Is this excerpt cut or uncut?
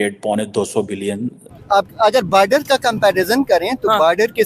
cut